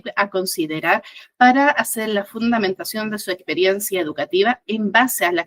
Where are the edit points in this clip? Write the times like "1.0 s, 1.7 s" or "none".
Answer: none